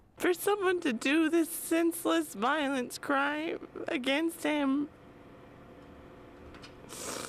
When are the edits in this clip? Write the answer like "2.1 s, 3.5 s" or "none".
2.5 s